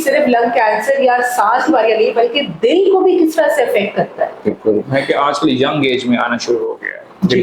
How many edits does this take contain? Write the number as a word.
one